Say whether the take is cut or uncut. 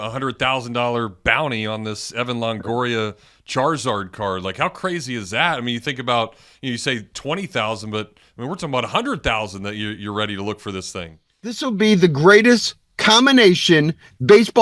cut